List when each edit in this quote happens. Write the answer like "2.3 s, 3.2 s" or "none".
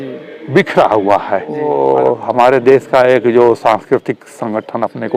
1.7 s